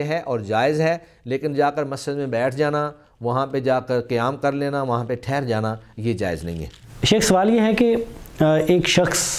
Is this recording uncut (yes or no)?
yes